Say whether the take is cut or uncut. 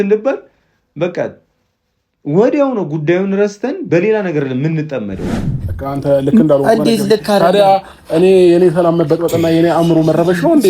cut